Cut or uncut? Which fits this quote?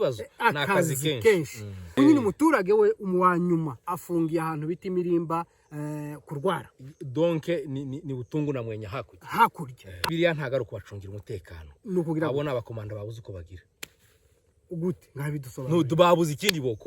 cut